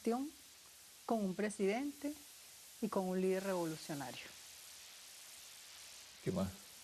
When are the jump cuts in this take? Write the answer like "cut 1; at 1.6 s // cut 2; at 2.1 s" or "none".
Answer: cut 1; at 2.6 s

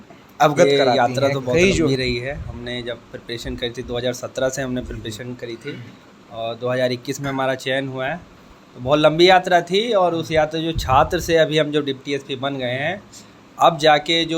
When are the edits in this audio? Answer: cut 1; at 1.9 s

